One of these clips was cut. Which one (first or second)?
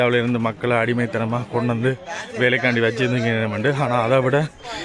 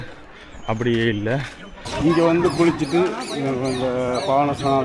second